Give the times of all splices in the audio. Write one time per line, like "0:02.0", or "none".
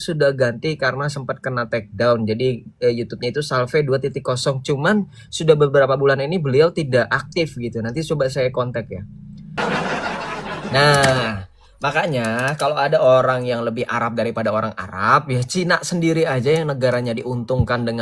0:09.6